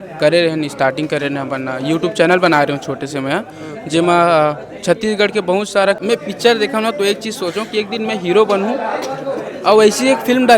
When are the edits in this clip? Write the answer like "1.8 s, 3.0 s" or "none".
6.0 s